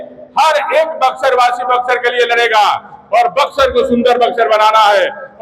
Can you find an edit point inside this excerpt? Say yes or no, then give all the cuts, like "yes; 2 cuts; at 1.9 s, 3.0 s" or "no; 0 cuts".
no; 0 cuts